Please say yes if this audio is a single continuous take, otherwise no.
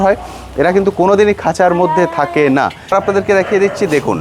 no